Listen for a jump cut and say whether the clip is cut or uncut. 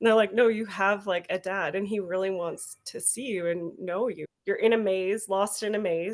cut